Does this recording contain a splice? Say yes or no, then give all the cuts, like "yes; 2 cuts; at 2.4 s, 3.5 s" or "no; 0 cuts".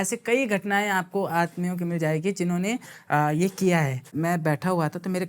yes; 1 cut; at 4.1 s